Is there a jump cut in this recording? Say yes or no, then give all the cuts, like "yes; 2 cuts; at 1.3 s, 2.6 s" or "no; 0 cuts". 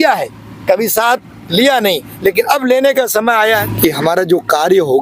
yes; 1 cut; at 3.6 s